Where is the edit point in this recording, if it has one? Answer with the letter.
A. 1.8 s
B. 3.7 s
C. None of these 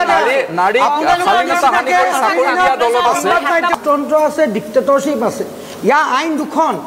B